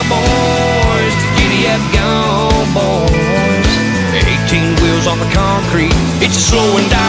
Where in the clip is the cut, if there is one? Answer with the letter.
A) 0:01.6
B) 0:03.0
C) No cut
C